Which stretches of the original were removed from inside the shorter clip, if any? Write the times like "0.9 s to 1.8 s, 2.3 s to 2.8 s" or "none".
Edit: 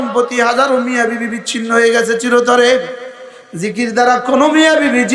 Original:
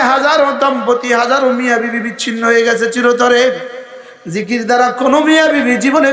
none